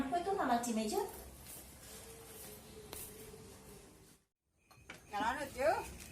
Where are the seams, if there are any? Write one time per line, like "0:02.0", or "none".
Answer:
0:04.1